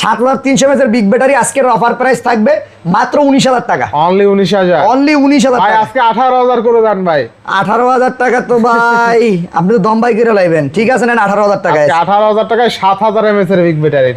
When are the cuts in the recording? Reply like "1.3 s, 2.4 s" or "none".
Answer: none